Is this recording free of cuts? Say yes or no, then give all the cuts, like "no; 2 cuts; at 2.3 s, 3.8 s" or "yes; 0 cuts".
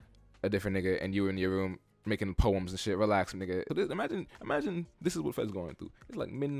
no; 1 cut; at 3.7 s